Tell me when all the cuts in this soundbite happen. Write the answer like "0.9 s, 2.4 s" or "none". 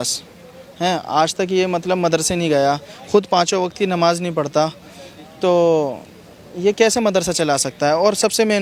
none